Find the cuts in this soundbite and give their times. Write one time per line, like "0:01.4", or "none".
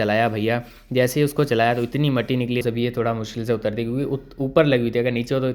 0:02.6